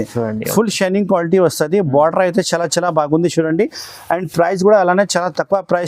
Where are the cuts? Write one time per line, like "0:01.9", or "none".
none